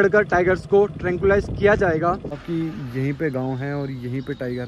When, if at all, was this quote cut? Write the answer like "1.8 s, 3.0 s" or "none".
2.3 s

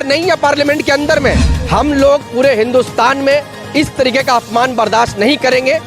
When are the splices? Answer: 1.5 s

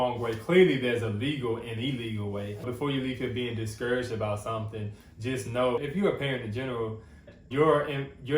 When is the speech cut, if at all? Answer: 2.6 s, 5.8 s, 7.2 s

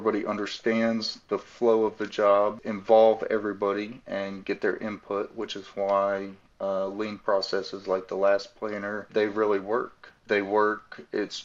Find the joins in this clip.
2.7 s, 9.1 s, 10.2 s

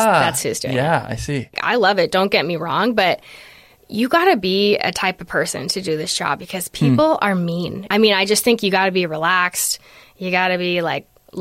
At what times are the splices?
1.5 s, 7.7 s

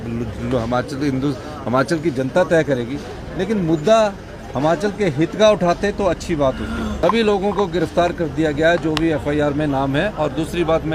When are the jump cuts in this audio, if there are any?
none

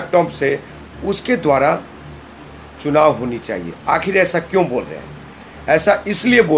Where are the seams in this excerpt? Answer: none

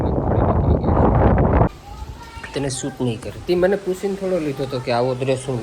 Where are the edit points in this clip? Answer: 1.7 s

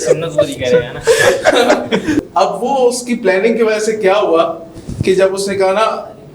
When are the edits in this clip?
2.2 s

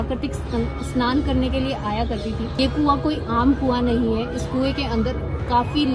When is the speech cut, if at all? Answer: 2.5 s

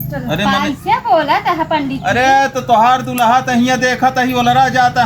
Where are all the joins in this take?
none

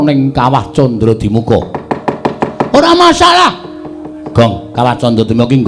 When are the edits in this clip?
none

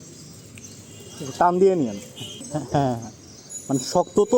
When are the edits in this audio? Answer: 2.4 s

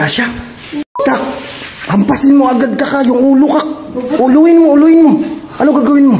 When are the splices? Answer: 1.0 s

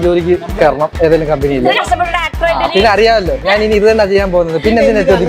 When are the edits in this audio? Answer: none

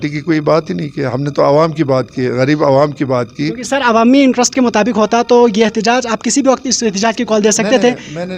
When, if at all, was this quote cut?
none

